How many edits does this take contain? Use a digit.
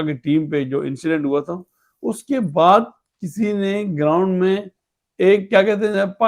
0